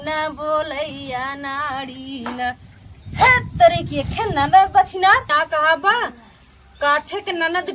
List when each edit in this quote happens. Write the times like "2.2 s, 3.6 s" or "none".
5.4 s